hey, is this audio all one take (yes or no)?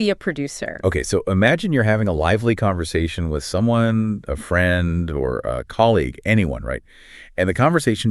yes